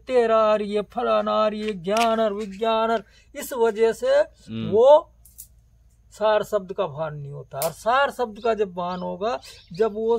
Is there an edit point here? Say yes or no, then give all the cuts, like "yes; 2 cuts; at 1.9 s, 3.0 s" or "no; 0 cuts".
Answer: no; 0 cuts